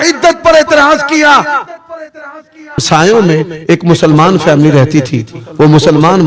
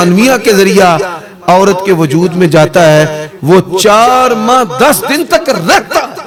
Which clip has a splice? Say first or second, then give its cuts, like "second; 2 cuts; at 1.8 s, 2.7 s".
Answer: first; 1 cut; at 2.8 s